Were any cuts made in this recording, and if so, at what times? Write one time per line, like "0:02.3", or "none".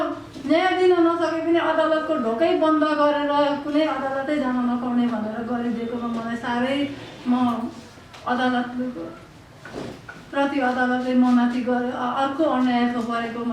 none

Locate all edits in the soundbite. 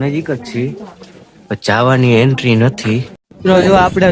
0:03.2

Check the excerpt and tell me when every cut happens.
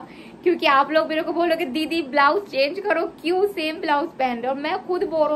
none

